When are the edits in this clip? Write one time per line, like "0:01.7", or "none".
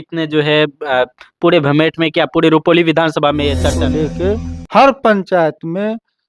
0:03.9